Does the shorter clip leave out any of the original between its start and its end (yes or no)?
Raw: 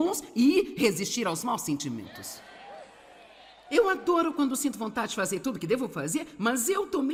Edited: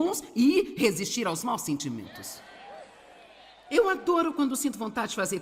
no